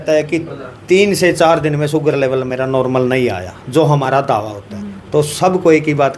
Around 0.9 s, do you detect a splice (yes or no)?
no